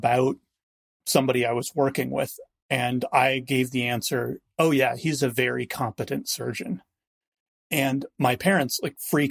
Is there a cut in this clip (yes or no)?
yes